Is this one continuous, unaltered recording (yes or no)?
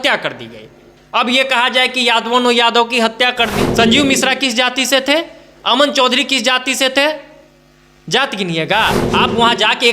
no